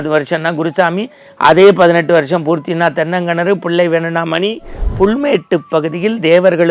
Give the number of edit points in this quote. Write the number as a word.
one